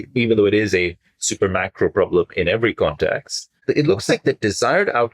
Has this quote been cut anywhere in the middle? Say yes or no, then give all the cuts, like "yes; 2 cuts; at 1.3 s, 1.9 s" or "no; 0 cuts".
yes; 1 cut; at 3.6 s